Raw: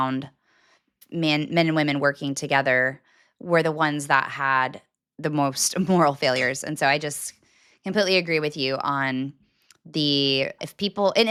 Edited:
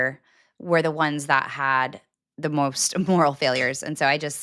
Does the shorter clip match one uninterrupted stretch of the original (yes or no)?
yes